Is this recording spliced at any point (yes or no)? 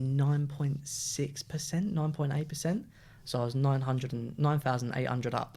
no